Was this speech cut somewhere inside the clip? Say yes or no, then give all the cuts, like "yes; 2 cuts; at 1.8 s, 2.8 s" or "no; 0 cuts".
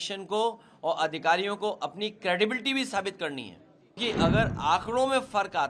yes; 1 cut; at 4.0 s